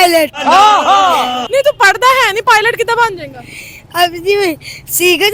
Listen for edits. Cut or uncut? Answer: uncut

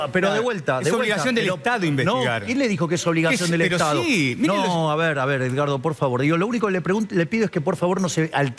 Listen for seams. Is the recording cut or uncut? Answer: uncut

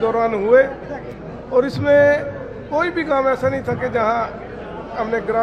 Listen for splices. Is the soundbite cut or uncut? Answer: uncut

